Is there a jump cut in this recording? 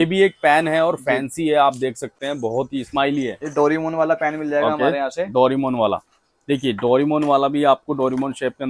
no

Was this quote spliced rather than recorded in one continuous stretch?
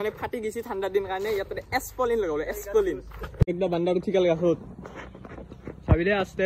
yes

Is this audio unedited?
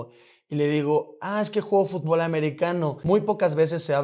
no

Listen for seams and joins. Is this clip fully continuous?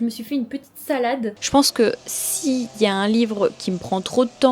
no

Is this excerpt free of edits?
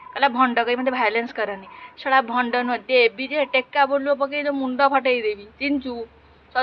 yes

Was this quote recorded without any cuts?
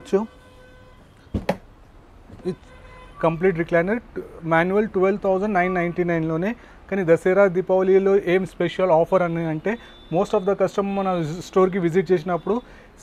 yes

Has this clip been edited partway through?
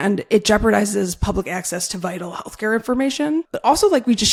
no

